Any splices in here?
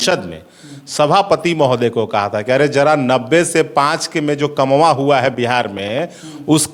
no; 0 cuts

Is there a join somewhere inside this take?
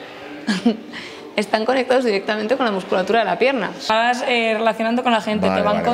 yes; 1 cut; at 3.9 s

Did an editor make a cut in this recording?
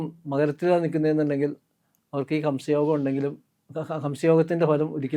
no; 0 cuts

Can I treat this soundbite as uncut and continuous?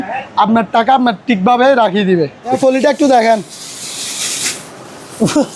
no; 1 cut; at 2.5 s

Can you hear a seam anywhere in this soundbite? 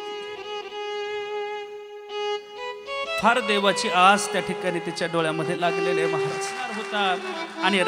yes; 1 cut; at 7.0 s

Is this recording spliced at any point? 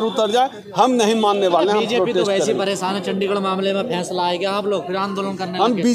no; 0 cuts

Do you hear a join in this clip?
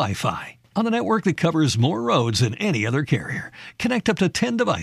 no; 0 cuts

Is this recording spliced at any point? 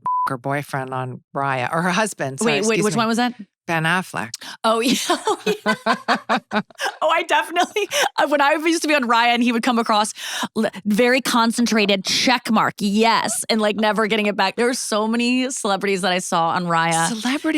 yes; 1 cut; at 14.5 s

